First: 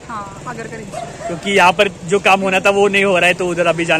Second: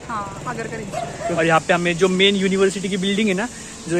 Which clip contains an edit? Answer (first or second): second